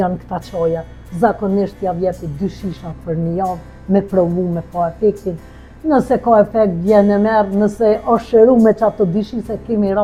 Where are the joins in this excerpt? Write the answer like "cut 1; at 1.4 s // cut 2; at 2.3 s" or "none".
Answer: none